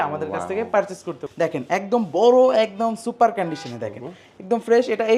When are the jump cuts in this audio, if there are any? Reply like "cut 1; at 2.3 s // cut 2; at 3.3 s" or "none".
cut 1; at 1.2 s